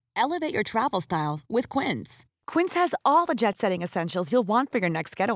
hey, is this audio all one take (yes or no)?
yes